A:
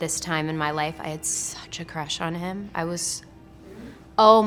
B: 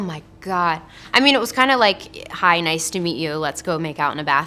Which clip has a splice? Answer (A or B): B